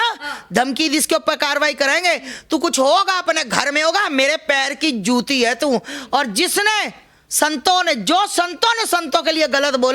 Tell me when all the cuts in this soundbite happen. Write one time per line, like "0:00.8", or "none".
none